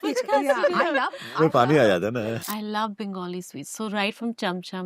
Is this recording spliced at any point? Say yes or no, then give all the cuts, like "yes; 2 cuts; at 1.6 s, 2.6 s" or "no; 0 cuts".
yes; 1 cut; at 2.4 s